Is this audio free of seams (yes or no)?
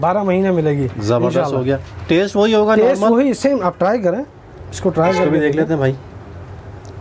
yes